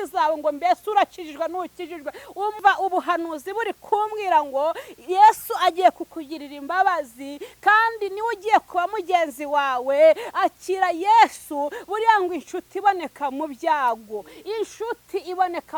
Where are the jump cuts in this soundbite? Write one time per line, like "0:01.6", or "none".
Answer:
0:02.6

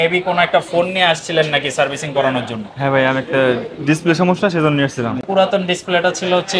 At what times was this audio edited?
0:05.2

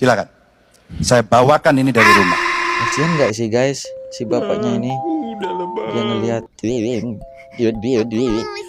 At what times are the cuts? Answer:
none

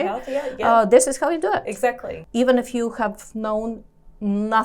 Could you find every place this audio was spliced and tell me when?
0:02.1

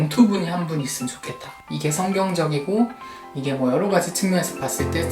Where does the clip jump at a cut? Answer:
0:01.8

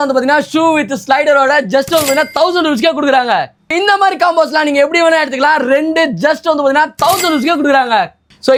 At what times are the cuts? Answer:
none

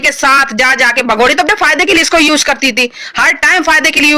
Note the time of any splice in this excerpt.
none

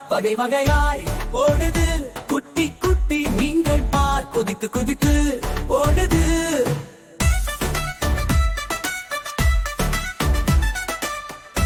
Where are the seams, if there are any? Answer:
none

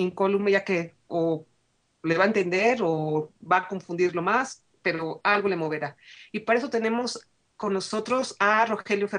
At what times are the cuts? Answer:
0:06.6

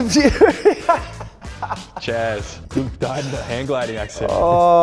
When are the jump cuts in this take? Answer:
0:02.5

